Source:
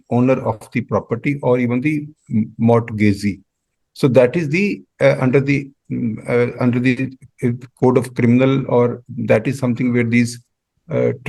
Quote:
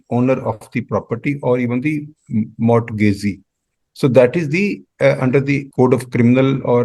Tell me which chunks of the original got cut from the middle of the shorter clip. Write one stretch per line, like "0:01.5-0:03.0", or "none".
0:05.7-0:07.7